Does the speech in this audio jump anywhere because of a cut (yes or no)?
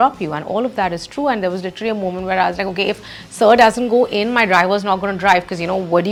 no